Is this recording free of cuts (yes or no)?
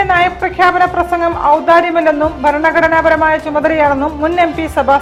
yes